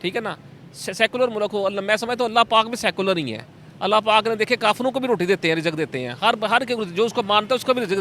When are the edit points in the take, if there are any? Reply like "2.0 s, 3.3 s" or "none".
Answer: none